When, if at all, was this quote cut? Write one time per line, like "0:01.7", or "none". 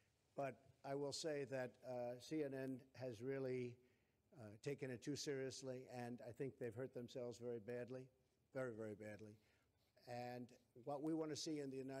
0:01.4